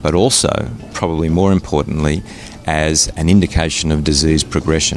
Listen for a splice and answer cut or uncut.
uncut